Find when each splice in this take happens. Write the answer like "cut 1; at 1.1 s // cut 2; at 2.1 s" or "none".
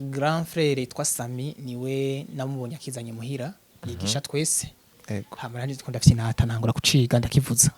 none